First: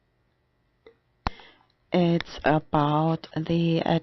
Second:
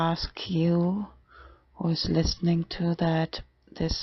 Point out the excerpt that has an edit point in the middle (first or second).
first